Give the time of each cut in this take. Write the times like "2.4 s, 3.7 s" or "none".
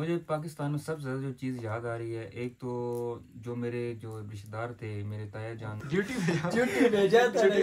5.8 s